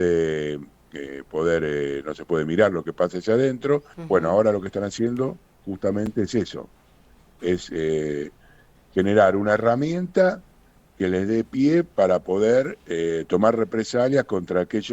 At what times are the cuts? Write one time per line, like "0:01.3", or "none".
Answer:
0:03.9